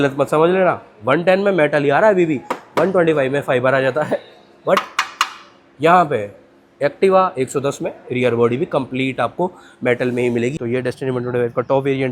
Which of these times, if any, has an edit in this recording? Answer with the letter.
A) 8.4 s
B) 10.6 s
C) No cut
B